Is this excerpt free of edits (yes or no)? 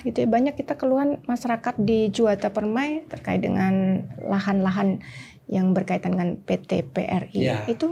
yes